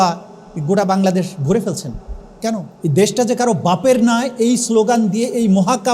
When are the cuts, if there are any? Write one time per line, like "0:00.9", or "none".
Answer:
0:02.7